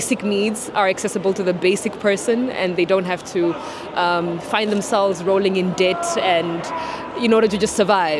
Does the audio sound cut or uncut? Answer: uncut